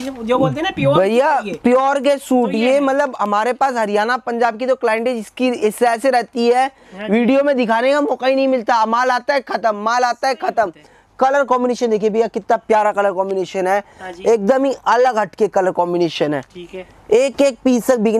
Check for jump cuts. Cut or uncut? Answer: uncut